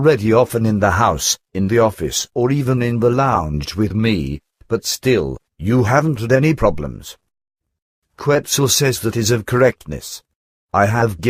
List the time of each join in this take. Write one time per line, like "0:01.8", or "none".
0:08.0